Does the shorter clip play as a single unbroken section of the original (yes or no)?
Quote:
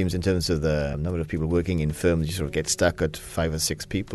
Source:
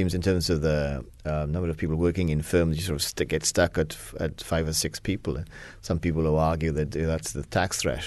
no